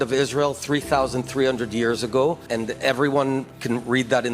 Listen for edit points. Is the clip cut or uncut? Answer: cut